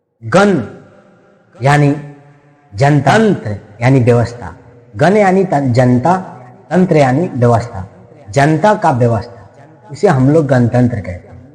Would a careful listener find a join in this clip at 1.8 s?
no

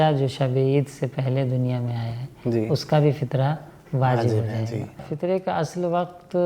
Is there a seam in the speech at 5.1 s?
yes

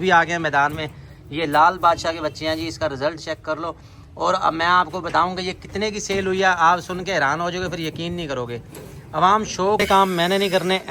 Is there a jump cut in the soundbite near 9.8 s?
yes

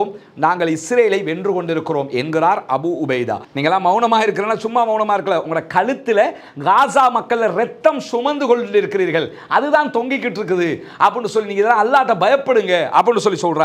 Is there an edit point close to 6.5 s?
no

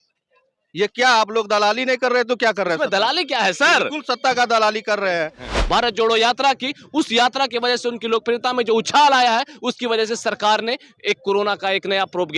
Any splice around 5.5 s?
yes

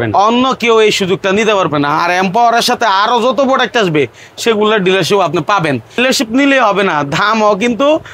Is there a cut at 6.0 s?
yes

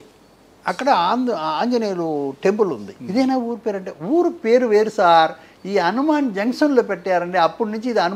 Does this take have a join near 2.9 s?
yes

